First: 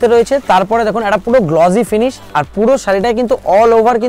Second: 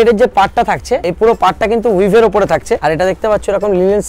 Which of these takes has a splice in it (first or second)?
second